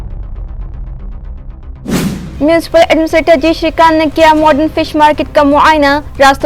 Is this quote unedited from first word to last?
yes; 0 cuts

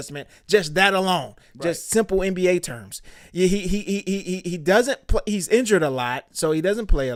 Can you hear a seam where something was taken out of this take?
no; 0 cuts

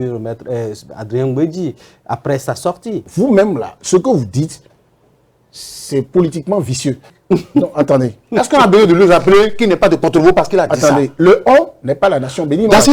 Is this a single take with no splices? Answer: no; 2 cuts; at 3.1 s, 7.1 s

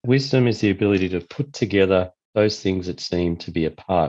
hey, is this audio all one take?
no; 1 cut; at 2.2 s

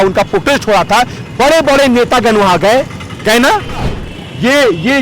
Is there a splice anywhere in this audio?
yes; 1 cut; at 4.0 s

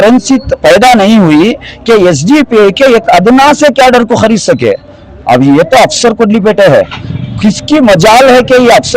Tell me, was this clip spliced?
no; 0 cuts

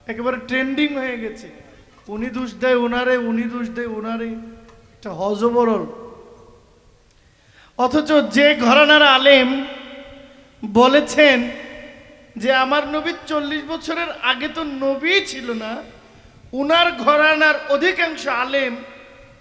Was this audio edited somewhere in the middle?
no; 0 cuts

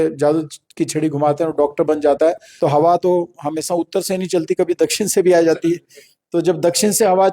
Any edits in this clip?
yes; 1 cut; at 2.5 s

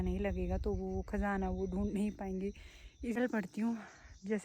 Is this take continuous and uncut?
no; 1 cut; at 3.2 s

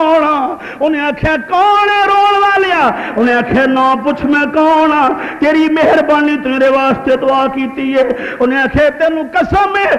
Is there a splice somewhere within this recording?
no; 0 cuts

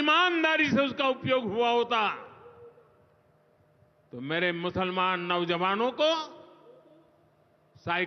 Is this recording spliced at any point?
no; 0 cuts

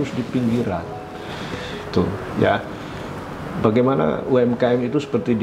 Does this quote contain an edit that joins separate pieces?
no; 0 cuts

